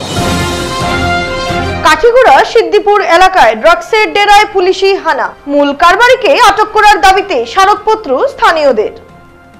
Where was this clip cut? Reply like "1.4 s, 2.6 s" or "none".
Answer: 1.1 s